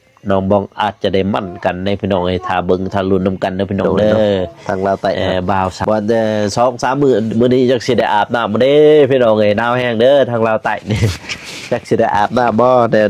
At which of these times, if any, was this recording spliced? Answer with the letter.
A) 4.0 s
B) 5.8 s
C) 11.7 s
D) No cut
B